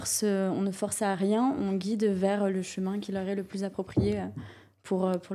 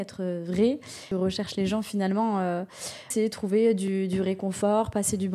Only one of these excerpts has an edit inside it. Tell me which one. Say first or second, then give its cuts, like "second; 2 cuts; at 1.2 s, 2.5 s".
second; 2 cuts; at 1.0 s, 3.1 s